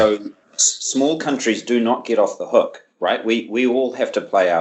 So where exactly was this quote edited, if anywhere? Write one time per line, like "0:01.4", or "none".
none